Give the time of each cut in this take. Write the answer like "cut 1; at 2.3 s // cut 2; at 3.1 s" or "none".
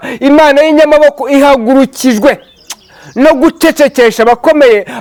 none